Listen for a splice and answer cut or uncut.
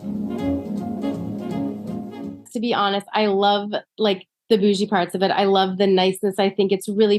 cut